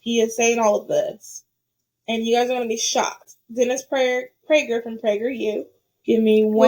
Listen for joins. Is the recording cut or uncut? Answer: uncut